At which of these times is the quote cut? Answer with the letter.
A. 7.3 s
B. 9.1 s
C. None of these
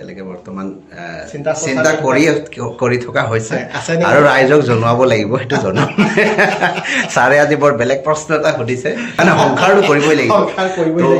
B